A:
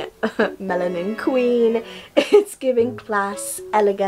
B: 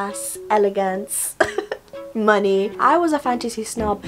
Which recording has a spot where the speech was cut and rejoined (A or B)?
B